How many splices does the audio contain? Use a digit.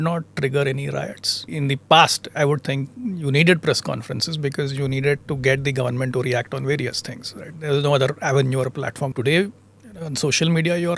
2